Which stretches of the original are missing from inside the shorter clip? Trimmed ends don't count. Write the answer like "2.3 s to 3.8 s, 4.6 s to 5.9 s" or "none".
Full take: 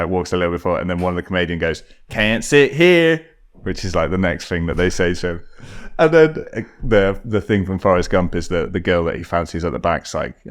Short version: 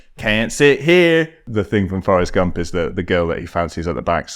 3.4 s to 7.2 s